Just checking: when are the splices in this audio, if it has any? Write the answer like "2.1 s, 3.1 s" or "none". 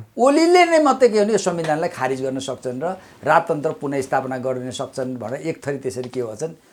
none

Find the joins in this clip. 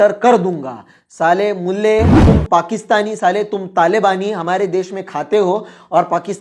2.3 s

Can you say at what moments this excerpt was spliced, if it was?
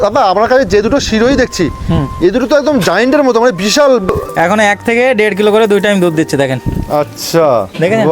4.1 s

